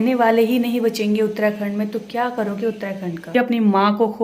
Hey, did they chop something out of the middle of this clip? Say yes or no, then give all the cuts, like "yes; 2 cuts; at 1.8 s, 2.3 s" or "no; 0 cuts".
yes; 1 cut; at 3.3 s